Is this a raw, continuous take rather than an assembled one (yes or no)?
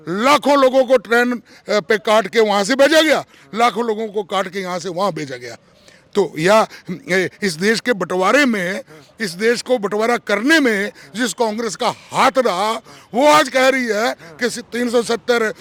yes